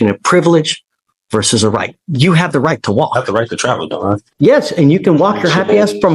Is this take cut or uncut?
cut